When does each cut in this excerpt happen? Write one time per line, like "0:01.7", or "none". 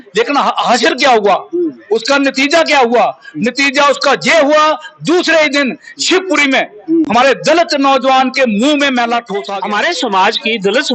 0:09.4